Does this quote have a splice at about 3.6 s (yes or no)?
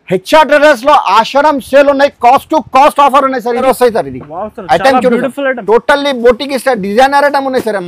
yes